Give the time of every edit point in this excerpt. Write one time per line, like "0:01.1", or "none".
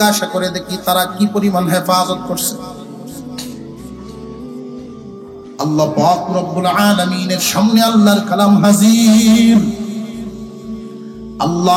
none